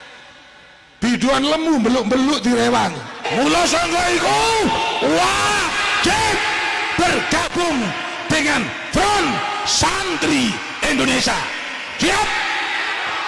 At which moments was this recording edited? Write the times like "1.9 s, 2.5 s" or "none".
3.3 s